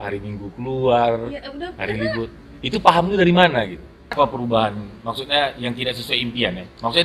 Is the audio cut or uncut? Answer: cut